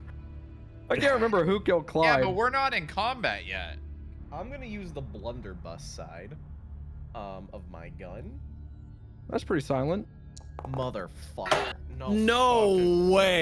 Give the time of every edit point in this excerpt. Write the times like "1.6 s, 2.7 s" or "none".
4.2 s